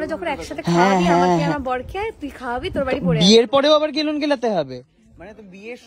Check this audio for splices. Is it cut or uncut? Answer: uncut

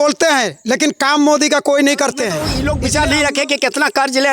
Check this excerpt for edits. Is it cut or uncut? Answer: cut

